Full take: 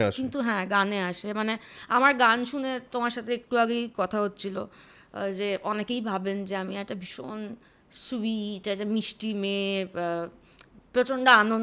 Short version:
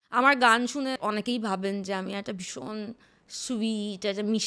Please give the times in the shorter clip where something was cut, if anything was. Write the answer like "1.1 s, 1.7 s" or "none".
1.0 s